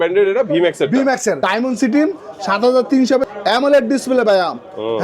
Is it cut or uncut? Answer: cut